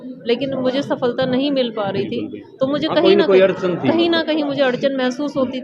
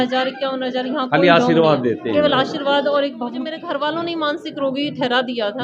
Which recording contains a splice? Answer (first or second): second